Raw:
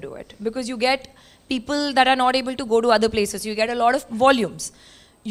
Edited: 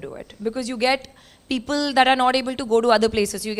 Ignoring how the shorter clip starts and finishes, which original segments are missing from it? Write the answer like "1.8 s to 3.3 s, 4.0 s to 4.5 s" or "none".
none